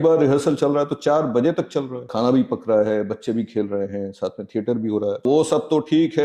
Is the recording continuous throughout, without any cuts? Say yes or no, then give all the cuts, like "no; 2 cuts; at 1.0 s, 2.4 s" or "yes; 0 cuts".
no; 2 cuts; at 2.1 s, 5.2 s